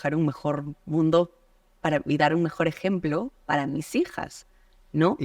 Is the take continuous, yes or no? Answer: yes